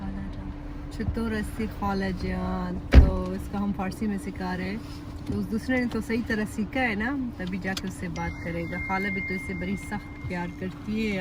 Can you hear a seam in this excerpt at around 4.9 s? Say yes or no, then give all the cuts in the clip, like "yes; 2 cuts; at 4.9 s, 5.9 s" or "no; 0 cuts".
no; 0 cuts